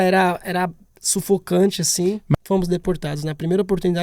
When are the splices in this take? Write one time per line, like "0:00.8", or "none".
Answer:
0:02.3